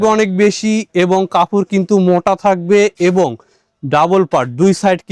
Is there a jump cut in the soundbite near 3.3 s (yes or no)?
no